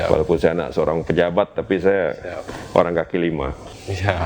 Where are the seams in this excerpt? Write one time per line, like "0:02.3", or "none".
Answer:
none